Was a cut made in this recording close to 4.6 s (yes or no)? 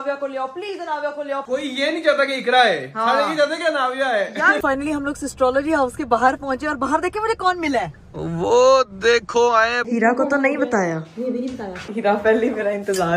yes